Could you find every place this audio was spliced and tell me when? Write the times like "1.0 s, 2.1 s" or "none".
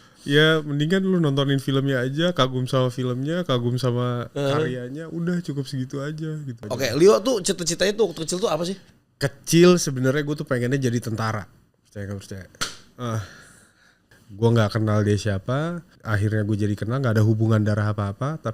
6.7 s, 14.0 s

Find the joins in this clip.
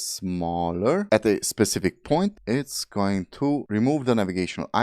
1.1 s

